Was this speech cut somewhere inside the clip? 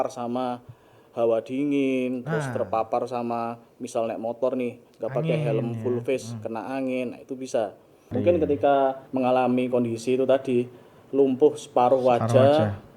yes; 2 cuts; at 8.1 s, 9.0 s

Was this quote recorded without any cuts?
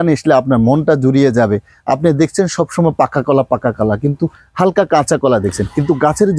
yes; 0 cuts

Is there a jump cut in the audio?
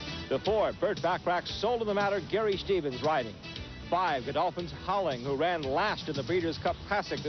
yes; 1 cut; at 3.2 s

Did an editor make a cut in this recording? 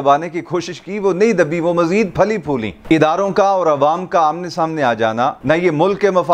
yes; 2 cuts; at 2.8 s, 5.4 s

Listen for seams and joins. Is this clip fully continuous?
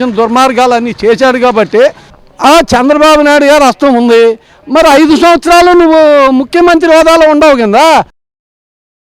no; 1 cut; at 2.1 s

